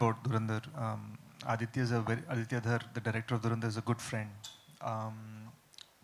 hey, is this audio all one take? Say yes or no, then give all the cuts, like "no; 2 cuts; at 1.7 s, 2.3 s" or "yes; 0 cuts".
yes; 0 cuts